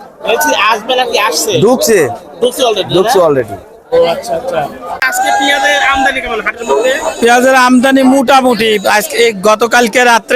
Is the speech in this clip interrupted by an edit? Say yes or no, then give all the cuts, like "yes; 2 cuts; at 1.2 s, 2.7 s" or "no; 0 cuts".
yes; 1 cut; at 5.0 s